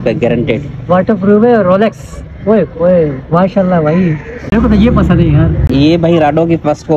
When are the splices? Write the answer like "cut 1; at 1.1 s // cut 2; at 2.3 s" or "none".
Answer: cut 1; at 4.5 s // cut 2; at 5.7 s